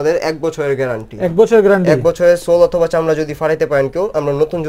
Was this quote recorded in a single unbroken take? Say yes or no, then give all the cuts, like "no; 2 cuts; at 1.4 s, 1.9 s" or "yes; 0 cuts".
yes; 0 cuts